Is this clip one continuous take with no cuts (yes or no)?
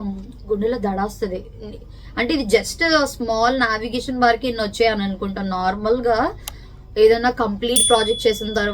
yes